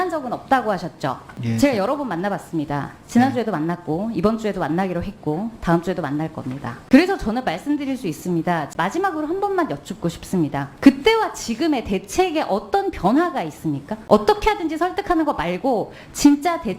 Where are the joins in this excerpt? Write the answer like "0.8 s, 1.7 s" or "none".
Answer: 1.3 s, 6.7 s, 8.7 s, 10.7 s, 13.9 s

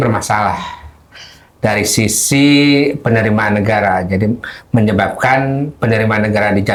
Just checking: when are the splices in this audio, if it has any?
none

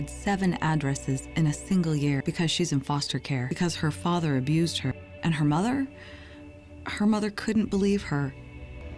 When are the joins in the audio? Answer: 3.5 s, 5.0 s

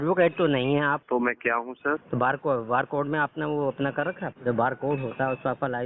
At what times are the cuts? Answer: 1.0 s, 2.0 s, 4.3 s

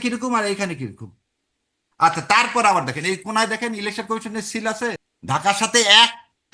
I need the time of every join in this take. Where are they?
5.1 s

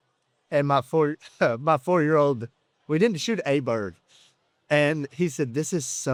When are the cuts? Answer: none

